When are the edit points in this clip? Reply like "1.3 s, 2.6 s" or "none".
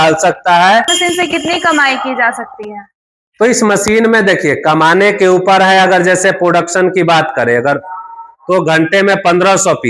none